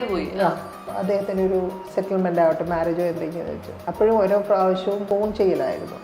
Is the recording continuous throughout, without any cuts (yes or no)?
no